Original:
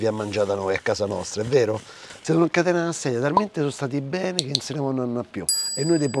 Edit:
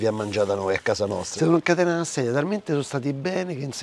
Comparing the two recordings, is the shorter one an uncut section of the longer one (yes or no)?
no